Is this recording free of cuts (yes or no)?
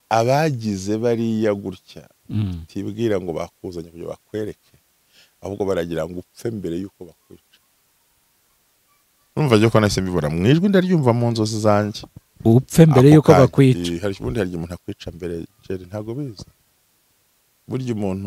yes